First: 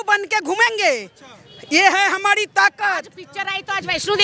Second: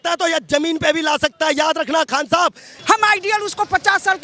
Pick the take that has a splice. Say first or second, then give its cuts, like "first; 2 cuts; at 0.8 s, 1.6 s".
second; 1 cut; at 2.7 s